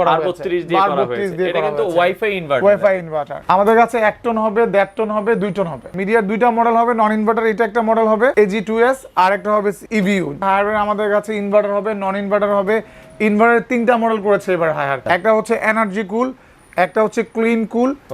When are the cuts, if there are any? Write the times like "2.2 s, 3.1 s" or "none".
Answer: 3.3 s, 5.9 s, 8.3 s, 10.3 s, 15.0 s